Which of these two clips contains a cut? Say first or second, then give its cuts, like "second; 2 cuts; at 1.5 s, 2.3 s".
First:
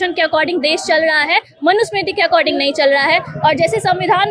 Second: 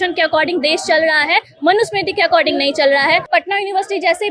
second; 1 cut; at 3.3 s